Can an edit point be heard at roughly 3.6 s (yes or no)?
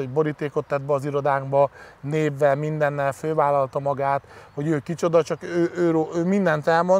no